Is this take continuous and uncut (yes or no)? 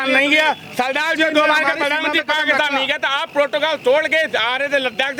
yes